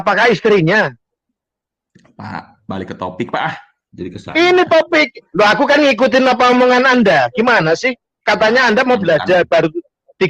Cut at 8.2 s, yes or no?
no